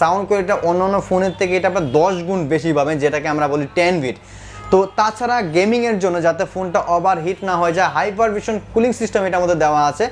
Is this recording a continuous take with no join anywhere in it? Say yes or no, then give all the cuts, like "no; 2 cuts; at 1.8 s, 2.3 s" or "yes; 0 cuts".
yes; 0 cuts